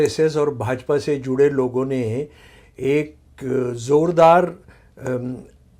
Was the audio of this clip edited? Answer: no; 0 cuts

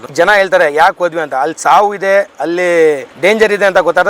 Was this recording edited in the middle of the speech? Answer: yes; 1 cut; at 3.1 s

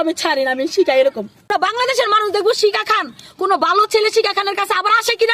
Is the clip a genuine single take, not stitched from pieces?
no; 1 cut; at 1.5 s

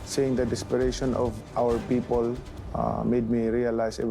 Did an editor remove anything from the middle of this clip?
yes; 1 cut; at 1.3 s

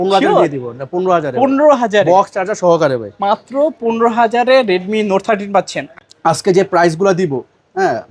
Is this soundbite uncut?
no; 1 cut; at 5.8 s

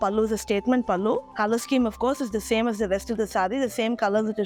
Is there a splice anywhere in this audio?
no; 0 cuts

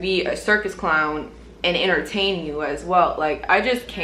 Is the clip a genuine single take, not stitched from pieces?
yes; 0 cuts

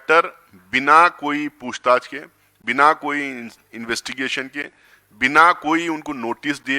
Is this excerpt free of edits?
yes; 0 cuts

